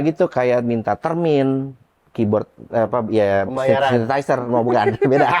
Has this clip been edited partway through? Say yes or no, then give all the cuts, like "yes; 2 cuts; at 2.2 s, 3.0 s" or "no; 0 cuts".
no; 0 cuts